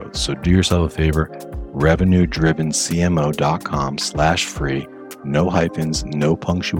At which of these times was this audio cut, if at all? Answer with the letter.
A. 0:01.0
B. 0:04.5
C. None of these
C